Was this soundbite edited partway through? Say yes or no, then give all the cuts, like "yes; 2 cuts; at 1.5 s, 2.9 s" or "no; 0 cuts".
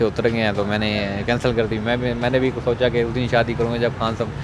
no; 0 cuts